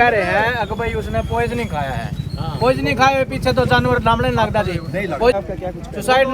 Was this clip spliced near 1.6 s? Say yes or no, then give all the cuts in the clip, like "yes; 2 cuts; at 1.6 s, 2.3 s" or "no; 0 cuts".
no; 1 cut; at 5.3 s